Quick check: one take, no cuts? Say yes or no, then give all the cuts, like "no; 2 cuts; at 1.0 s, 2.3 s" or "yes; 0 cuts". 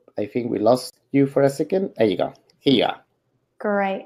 yes; 0 cuts